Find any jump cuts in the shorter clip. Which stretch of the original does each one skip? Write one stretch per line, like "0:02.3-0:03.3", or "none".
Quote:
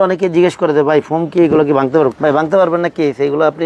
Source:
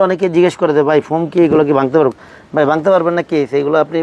0:02.2-0:02.5

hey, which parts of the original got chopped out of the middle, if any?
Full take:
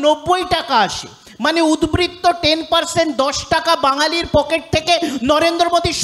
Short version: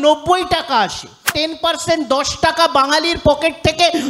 0:01.3-0:02.4

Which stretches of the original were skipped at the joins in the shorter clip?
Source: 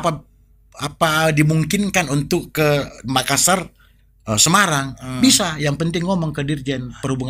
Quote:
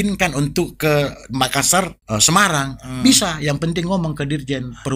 0:03.7-0:04.2

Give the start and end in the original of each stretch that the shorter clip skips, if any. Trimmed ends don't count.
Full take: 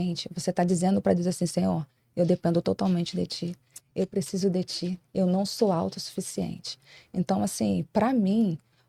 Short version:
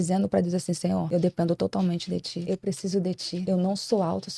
0:01.8-0:02.1
0:03.4-0:03.8
0:04.9-0:05.1

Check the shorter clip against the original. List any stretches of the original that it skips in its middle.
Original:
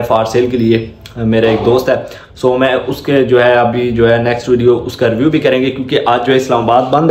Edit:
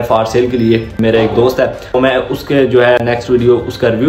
0:00.9-0:01.2
0:02.2-0:02.5
0:03.6-0:04.2

